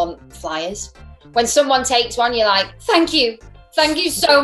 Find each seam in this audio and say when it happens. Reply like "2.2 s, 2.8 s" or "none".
2.7 s